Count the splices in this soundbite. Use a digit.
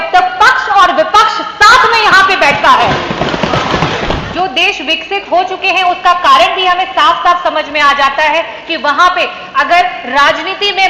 1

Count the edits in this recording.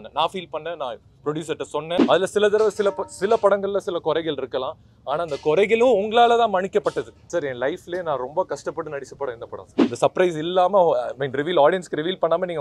3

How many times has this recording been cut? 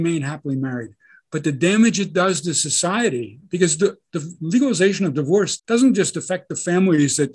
1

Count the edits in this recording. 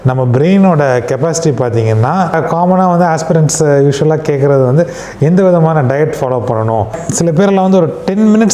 2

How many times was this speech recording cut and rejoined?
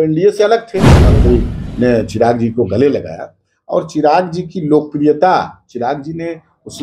1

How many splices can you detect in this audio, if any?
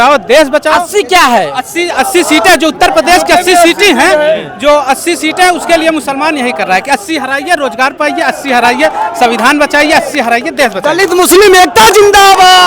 0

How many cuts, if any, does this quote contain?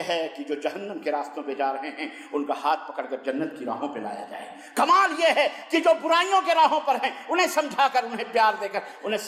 0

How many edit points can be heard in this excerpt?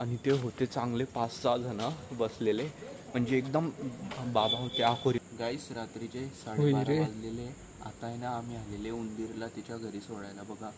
1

